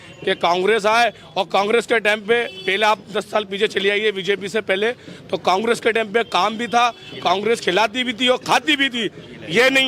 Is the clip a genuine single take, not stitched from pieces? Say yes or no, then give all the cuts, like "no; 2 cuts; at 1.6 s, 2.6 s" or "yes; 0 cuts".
yes; 0 cuts